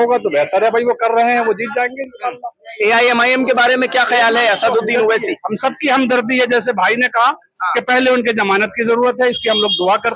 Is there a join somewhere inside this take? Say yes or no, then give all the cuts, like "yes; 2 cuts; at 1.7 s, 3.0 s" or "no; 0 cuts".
no; 0 cuts